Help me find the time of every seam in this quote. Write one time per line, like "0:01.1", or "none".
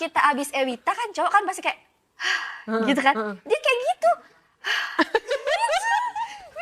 none